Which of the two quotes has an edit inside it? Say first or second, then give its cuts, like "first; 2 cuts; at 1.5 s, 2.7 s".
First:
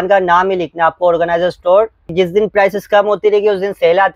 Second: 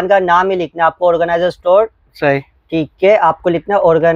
first; 1 cut; at 2.1 s